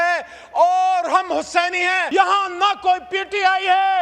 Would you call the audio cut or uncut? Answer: cut